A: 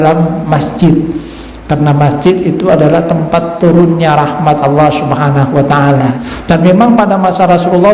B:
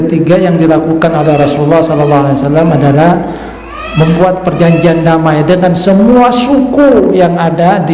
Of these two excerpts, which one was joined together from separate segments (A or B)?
A